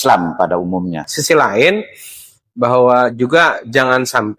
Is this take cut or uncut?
cut